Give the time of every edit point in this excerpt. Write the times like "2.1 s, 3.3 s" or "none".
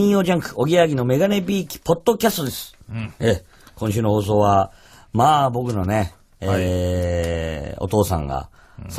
none